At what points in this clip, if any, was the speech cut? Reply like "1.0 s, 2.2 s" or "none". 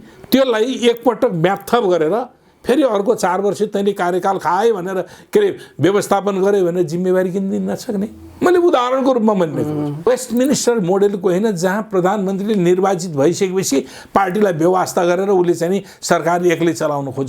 10.1 s